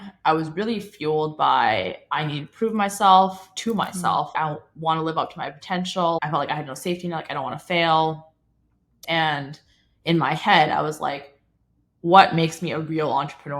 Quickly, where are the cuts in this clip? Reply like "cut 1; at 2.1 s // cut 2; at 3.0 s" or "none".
cut 1; at 4.3 s // cut 2; at 6.2 s // cut 3; at 9.0 s